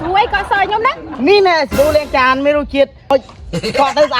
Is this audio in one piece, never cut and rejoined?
no; 2 cuts; at 1.1 s, 3.1 s

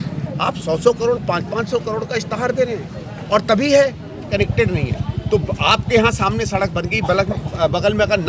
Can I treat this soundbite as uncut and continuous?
no; 1 cut; at 4.3 s

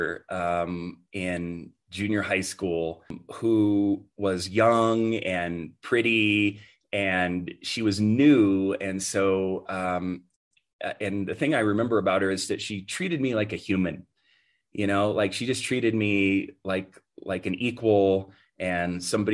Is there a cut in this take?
yes; 1 cut; at 3.2 s

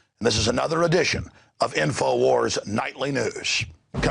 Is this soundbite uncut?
no; 1 cut; at 3.2 s

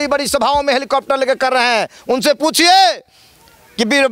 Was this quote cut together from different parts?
no; 0 cuts

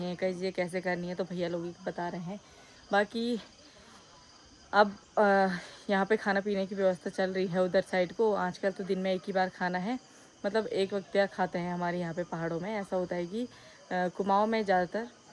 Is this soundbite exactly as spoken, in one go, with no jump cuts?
yes; 0 cuts

